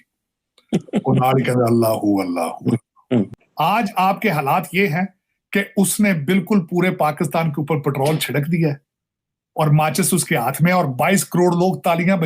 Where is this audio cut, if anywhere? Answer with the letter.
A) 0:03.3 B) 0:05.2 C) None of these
A